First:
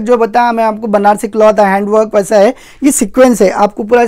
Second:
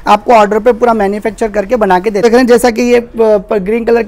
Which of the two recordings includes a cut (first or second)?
second